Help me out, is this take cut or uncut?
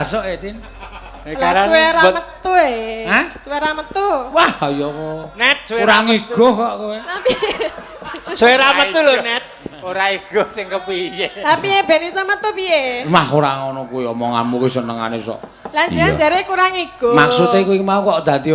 uncut